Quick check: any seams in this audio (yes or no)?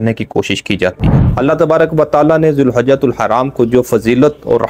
yes